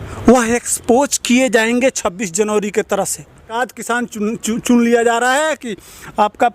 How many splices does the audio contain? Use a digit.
1